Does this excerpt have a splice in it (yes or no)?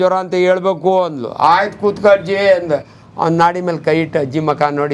no